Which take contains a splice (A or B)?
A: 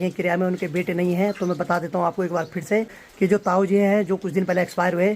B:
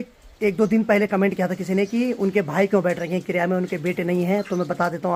A